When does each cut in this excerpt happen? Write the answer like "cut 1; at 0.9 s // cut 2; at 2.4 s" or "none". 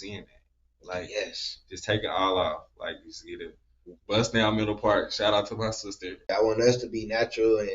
cut 1; at 6.2 s

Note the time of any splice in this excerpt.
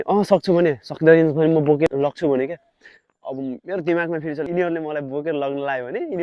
cut 1; at 1.9 s // cut 2; at 4.5 s

